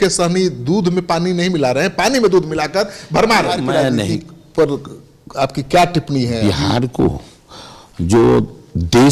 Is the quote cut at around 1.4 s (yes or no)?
no